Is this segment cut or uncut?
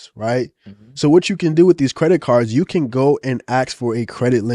uncut